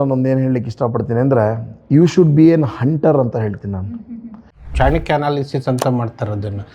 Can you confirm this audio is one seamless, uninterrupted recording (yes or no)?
no